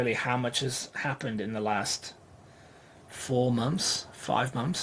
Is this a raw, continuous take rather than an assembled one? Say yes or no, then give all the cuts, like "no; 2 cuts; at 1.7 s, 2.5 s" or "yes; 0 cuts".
yes; 0 cuts